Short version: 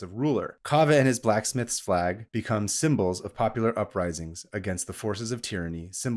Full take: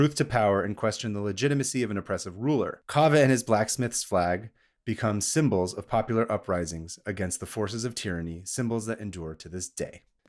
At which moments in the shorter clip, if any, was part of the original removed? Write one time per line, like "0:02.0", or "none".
0:02.3